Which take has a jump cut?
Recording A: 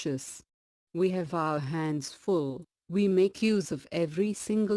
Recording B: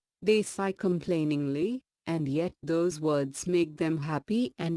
B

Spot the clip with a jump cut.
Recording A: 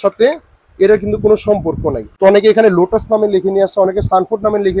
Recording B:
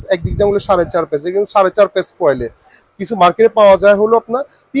A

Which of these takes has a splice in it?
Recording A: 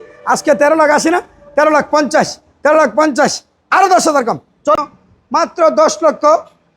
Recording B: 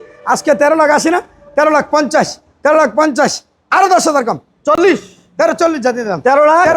A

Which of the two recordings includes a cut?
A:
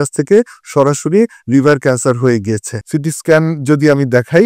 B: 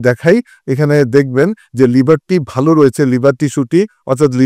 A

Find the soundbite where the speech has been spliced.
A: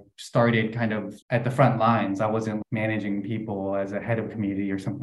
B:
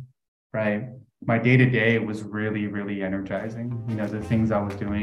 A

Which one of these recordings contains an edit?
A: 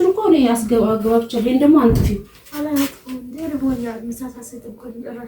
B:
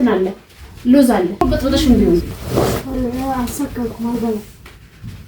B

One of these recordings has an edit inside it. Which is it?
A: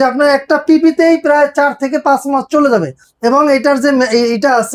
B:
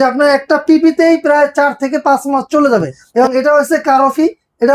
B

